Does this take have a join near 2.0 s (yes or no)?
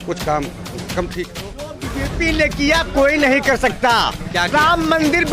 yes